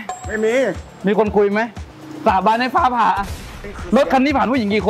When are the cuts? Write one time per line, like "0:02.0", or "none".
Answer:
0:03.5